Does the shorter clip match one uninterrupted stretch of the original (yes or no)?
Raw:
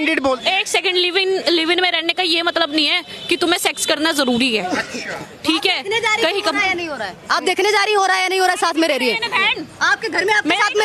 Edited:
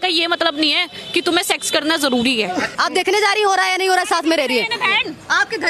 no